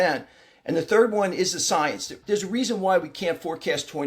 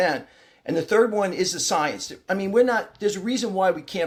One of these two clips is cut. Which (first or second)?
first